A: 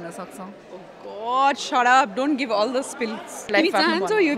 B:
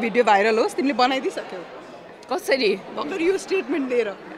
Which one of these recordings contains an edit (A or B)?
A